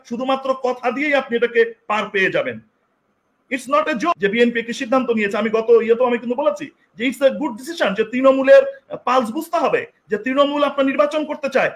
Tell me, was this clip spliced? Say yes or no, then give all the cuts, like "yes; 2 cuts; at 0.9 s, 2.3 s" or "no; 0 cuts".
yes; 1 cut; at 4.1 s